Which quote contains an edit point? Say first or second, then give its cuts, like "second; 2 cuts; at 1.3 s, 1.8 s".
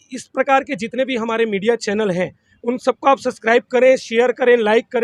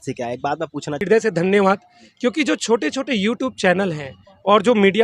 second; 1 cut; at 1.0 s